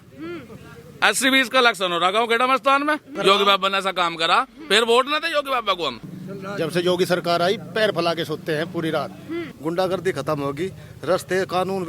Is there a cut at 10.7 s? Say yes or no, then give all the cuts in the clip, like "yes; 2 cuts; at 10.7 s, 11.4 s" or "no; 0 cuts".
no; 3 cuts; at 3.1 s, 6.1 s, 9.5 s